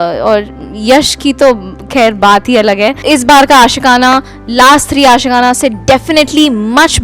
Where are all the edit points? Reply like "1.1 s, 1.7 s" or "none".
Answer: 3.0 s